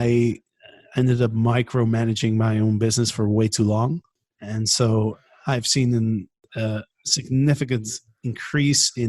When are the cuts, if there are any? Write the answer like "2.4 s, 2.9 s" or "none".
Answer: 4.1 s, 6.4 s